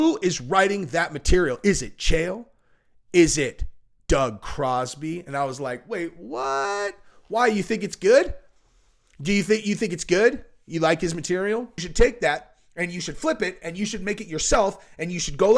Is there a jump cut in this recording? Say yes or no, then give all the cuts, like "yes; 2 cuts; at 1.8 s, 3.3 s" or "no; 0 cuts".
yes; 1 cut; at 11.7 s